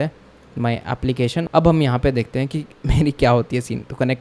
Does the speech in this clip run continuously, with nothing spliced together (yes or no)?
no